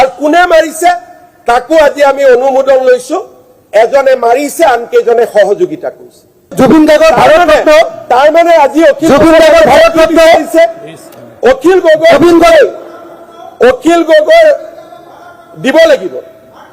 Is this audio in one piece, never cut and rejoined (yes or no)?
no